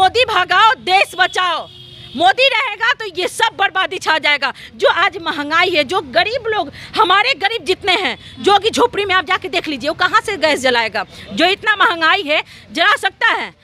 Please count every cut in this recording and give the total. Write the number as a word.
zero